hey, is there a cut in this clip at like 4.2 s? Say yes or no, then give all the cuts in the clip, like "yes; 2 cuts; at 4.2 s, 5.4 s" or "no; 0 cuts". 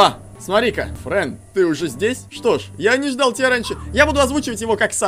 no; 2 cuts; at 0.9 s, 2.3 s